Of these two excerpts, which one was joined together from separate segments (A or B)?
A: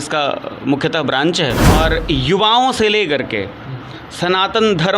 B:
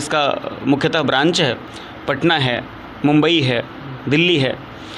A